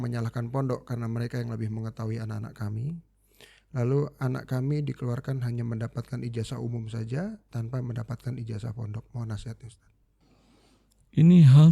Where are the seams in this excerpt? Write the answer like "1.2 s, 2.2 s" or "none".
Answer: none